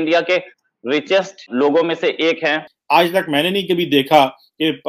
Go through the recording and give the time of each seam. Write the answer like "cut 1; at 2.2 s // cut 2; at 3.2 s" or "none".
cut 1; at 1.5 s // cut 2; at 2.7 s